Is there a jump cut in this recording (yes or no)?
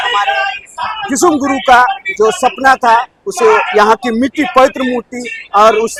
no